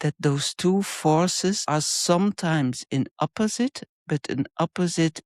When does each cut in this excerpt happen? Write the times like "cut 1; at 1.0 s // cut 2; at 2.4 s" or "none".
cut 1; at 1.7 s

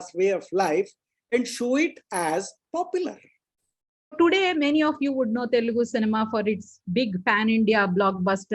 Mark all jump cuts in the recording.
cut 1; at 4.1 s

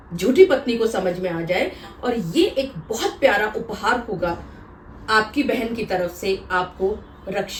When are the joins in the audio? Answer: none

